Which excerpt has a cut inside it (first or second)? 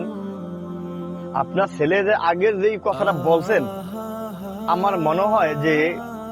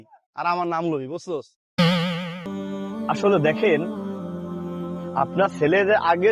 second